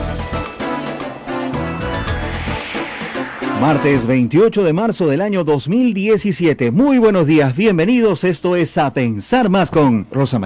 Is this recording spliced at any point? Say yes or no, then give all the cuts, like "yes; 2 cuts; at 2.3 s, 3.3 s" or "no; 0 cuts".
yes; 1 cut; at 1.2 s